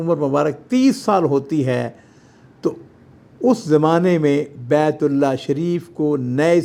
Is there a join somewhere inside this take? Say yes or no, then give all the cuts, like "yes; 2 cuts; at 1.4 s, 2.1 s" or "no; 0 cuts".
no; 0 cuts